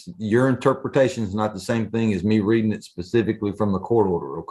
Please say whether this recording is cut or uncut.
uncut